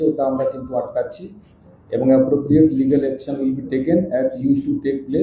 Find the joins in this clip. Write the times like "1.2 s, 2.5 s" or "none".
none